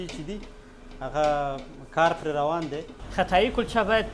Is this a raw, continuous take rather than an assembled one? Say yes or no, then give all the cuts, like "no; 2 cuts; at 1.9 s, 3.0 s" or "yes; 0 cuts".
no; 1 cut; at 2.9 s